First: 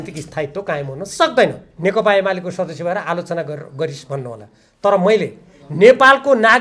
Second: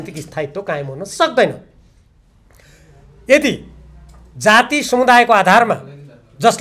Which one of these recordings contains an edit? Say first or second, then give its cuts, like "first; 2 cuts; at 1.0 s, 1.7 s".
first; 1 cut; at 1.7 s